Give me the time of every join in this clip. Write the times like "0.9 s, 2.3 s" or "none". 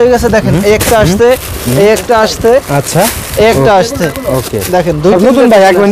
none